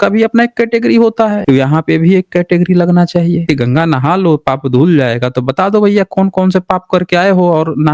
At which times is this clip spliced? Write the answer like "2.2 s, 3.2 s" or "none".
1.4 s, 3.4 s